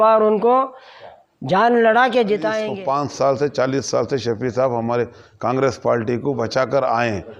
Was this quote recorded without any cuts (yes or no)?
no